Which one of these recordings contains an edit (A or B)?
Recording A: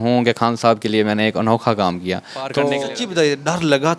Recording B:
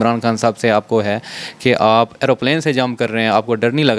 A